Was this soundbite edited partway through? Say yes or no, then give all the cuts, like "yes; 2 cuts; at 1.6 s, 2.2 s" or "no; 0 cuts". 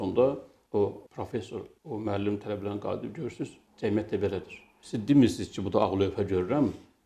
no; 0 cuts